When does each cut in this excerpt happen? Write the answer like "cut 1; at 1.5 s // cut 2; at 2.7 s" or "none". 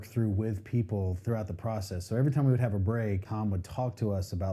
cut 1; at 3.3 s